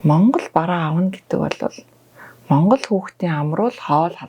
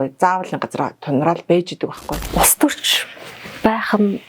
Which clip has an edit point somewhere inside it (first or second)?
second